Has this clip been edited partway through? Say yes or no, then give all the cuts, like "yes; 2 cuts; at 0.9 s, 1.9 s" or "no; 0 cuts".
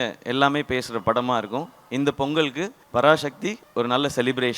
yes; 2 cuts; at 2.7 s, 3.6 s